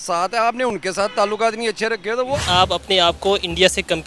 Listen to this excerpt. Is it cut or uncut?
cut